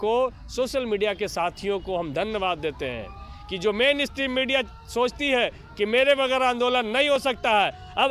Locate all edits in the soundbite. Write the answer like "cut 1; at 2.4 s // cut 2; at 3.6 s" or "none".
none